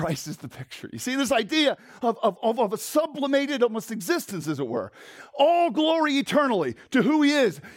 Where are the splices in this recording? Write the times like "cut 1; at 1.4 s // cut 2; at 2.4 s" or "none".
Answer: none